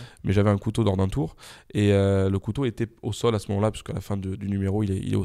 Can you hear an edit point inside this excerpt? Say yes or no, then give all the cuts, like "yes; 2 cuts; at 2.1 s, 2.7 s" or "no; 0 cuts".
no; 0 cuts